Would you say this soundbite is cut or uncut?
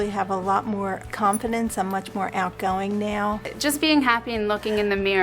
cut